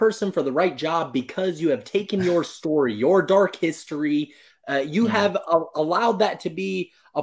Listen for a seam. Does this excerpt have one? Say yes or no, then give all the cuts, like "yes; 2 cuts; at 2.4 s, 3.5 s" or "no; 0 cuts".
no; 0 cuts